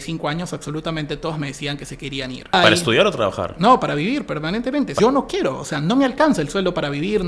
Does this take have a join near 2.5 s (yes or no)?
yes